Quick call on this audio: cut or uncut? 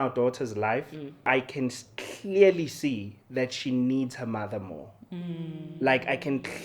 cut